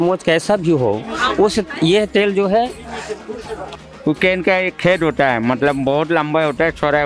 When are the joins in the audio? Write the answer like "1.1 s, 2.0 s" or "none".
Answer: 3.7 s